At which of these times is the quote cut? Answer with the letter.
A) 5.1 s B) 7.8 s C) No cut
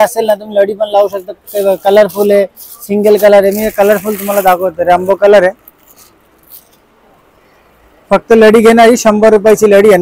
C